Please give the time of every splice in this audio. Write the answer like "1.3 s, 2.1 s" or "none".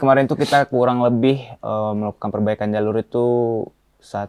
none